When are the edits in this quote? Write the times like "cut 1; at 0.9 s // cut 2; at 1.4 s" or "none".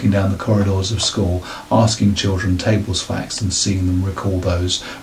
none

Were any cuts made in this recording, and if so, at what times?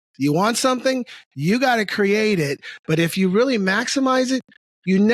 none

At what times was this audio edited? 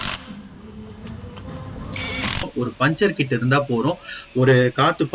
cut 1; at 2.5 s

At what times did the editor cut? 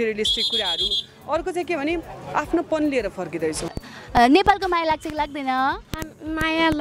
cut 1; at 3.8 s

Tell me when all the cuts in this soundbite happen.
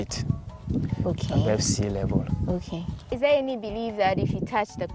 cut 1; at 3.1 s

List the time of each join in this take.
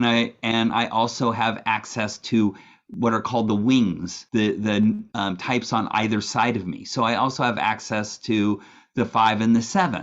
cut 1; at 4.1 s // cut 2; at 5.1 s

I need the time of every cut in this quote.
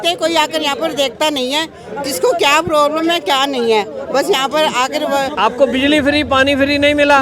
none

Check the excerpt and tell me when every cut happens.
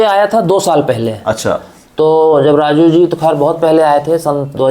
none

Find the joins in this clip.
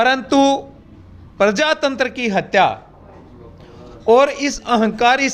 none

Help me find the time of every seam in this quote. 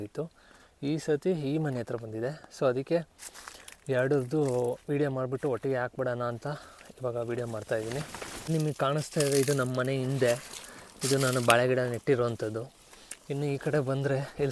none

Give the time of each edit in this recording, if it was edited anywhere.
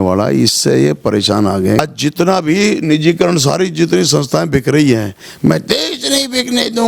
cut 1; at 1.8 s

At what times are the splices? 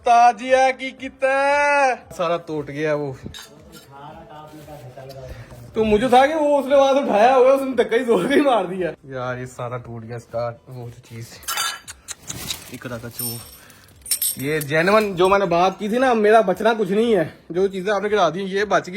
none

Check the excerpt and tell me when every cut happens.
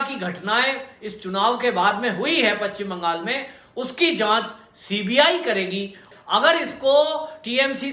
cut 1; at 6.1 s

